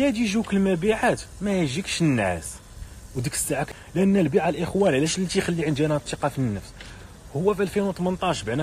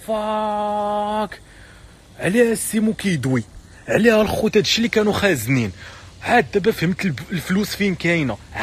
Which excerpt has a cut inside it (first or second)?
first